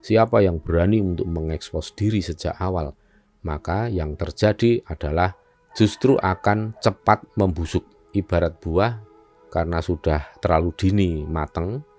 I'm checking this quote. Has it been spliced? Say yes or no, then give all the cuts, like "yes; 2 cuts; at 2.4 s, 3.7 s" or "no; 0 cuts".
no; 0 cuts